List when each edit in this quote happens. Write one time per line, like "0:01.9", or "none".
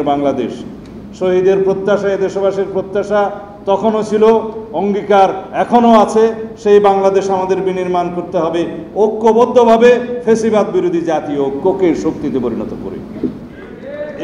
none